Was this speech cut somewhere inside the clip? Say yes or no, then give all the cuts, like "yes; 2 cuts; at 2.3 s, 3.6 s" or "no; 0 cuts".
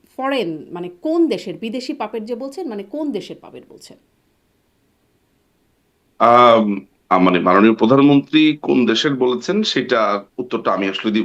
no; 0 cuts